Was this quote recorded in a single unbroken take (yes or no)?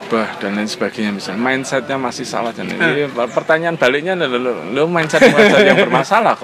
yes